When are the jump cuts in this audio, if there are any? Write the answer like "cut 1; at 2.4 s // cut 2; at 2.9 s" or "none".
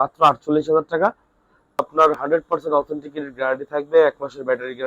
cut 1; at 1.8 s